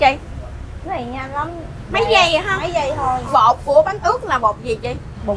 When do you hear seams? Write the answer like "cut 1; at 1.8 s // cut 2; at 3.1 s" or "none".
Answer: cut 1; at 3.3 s